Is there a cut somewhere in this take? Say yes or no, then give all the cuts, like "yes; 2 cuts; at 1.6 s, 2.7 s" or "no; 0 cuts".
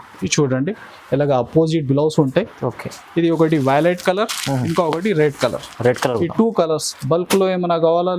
no; 0 cuts